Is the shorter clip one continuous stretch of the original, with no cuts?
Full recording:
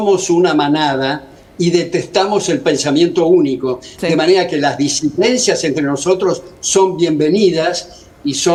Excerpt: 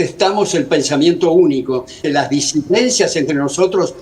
no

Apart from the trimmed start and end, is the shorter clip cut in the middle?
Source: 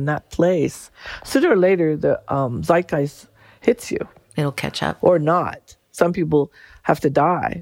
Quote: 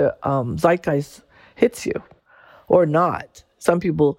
yes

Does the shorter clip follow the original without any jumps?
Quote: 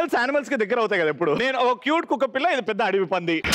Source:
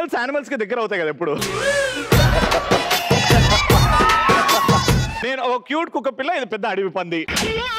no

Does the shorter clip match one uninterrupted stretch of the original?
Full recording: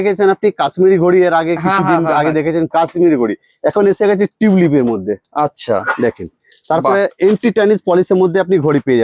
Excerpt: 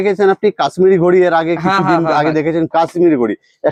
yes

